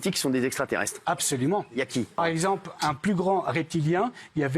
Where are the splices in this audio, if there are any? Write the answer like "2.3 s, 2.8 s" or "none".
2.2 s